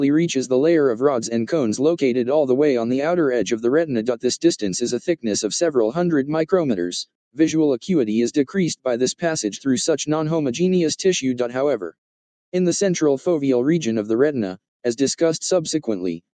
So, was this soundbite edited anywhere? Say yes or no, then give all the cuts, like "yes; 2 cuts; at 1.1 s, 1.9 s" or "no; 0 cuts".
yes; 1 cut; at 15.2 s